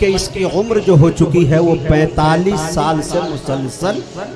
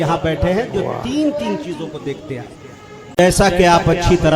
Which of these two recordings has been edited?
second; 1 cut; at 3.2 s

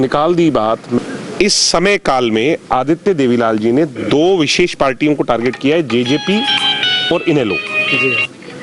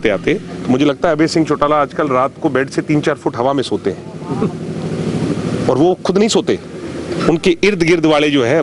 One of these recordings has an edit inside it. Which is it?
first; 1 cut; at 1.0 s

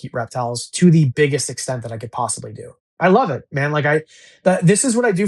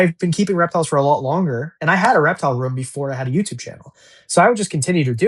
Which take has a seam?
first; 1 cut; at 3.0 s

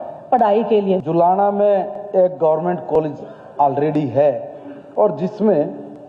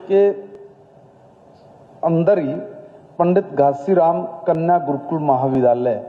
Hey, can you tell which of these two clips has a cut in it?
first; 1 cut; at 1.0 s

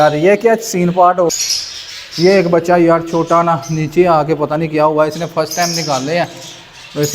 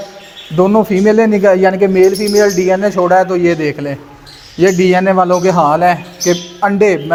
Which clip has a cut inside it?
first; 1 cut; at 1.3 s

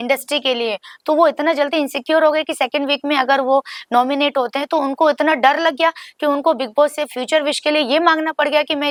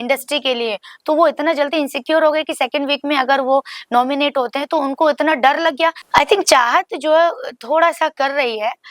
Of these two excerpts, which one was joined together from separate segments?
second; 1 cut; at 6.0 s

